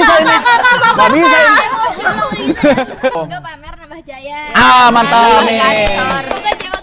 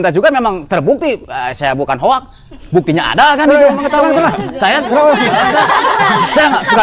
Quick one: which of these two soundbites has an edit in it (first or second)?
first